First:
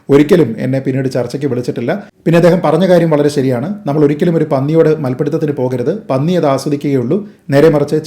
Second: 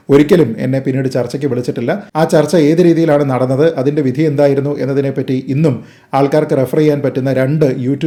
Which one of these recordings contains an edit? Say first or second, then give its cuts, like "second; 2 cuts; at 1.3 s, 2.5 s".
first; 1 cut; at 2.1 s